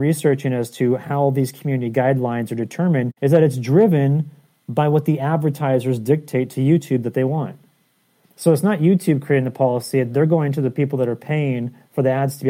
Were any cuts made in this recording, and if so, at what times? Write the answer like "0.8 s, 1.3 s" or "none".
none

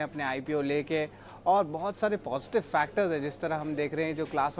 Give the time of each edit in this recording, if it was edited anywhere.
none

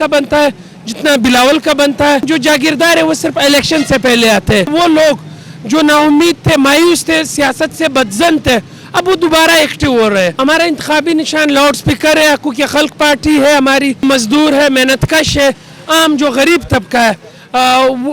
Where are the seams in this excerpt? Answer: 2.3 s, 4.7 s, 10.3 s, 14.0 s

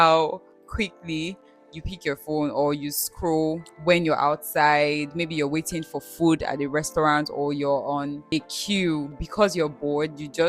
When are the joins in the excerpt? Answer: 3.7 s, 8.2 s, 9.2 s

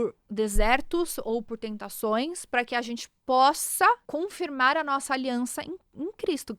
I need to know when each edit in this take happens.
4.1 s

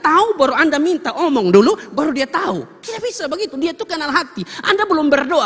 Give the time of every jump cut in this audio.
none

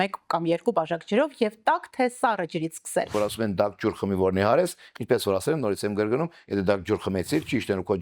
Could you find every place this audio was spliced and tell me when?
3.1 s

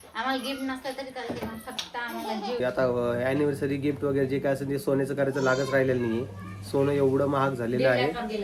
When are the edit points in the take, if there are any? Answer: 2.6 s

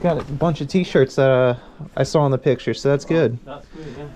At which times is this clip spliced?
none

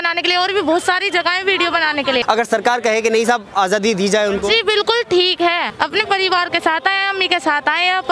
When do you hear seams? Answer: 2.2 s, 5.7 s

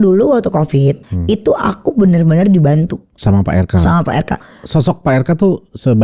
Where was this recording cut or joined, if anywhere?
1.1 s, 3.1 s, 4.3 s

